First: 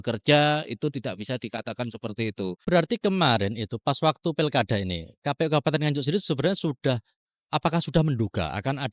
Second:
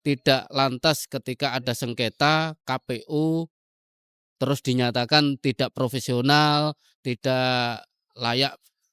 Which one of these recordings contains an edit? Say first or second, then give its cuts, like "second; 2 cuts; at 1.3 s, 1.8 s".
first; 1 cut; at 2.6 s